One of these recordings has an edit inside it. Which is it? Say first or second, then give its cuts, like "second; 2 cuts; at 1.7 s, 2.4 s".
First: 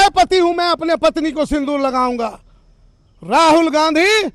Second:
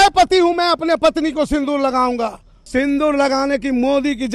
second; 1 cut; at 2.7 s